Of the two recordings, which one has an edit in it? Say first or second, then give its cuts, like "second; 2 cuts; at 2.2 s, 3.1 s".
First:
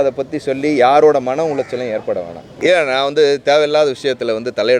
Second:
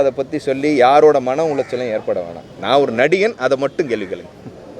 first; 1 cut; at 2.4 s